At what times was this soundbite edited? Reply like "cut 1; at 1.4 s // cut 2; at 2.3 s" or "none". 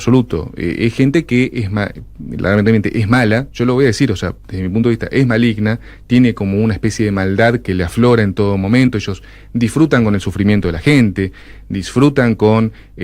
none